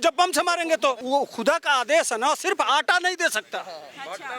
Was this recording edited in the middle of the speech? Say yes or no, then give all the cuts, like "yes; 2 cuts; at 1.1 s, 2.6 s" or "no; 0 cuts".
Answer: yes; 1 cut; at 1.0 s